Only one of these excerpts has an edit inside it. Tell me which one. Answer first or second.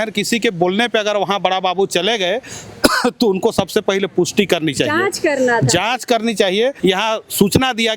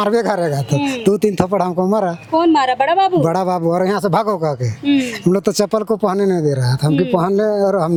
first